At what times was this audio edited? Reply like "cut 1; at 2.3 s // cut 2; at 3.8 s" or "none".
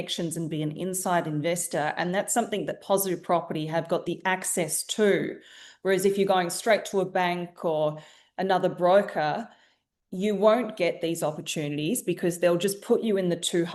none